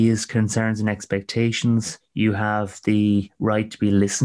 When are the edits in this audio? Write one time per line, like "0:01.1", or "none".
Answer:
0:02.0
0:03.3